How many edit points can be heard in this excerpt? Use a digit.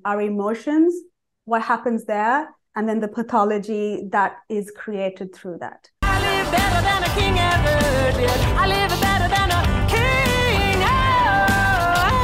1